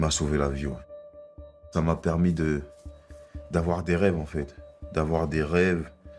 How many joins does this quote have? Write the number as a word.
one